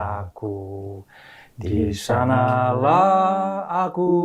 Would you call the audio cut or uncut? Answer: uncut